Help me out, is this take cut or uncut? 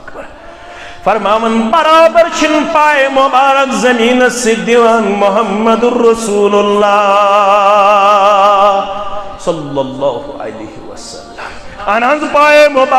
cut